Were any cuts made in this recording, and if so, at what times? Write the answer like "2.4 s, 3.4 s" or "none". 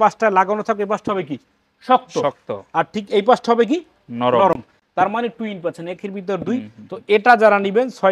none